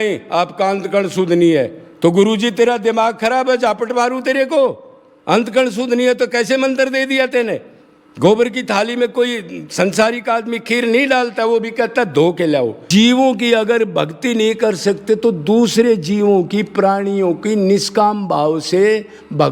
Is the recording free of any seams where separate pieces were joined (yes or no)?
no